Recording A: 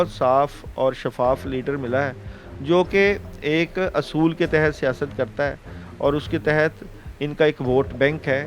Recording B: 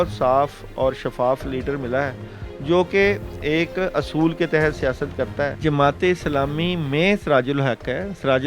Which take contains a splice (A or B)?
B